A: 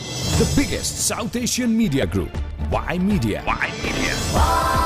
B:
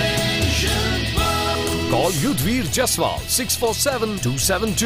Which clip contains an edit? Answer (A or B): A